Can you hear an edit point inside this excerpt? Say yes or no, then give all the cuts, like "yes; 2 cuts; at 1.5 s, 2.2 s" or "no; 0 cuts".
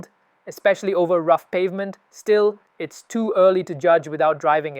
no; 0 cuts